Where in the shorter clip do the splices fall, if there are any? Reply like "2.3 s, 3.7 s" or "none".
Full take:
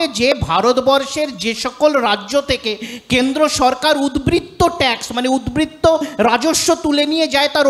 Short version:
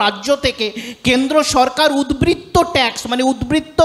none